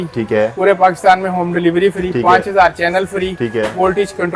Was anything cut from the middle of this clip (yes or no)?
no